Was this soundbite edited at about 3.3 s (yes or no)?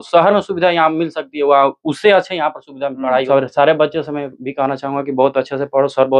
yes